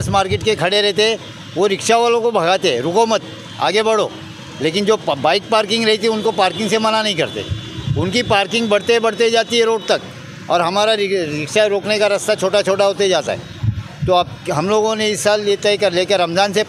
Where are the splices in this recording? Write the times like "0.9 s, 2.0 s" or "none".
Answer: none